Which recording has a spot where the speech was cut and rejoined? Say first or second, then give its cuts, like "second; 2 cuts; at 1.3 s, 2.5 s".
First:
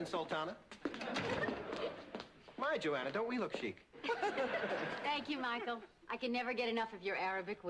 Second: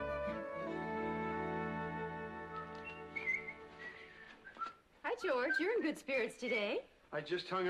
first; 1 cut; at 4.5 s